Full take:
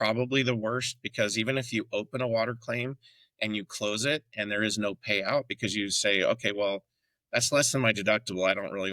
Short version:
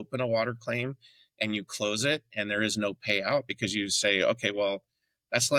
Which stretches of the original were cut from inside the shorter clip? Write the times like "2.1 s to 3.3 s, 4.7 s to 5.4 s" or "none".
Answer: none